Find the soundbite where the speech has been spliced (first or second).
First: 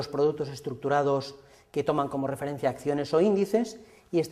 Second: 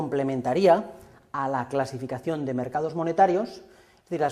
first